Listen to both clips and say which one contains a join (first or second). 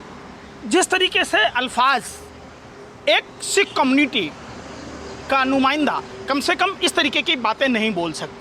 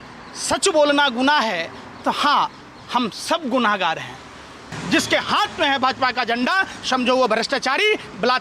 second